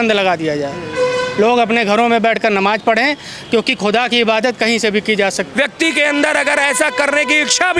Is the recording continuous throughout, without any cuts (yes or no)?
no